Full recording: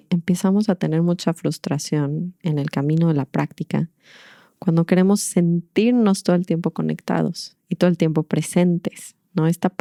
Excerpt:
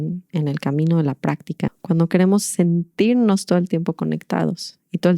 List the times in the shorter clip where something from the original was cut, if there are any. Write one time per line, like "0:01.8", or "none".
0:01.8